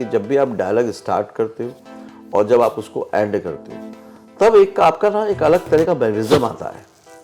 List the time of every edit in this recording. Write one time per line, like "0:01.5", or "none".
none